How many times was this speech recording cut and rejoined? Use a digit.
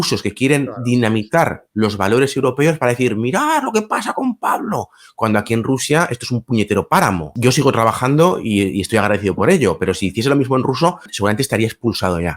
2